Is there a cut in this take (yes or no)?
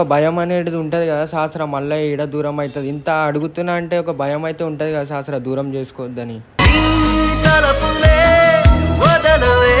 no